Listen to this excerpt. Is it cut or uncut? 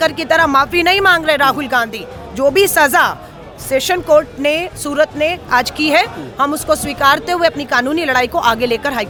uncut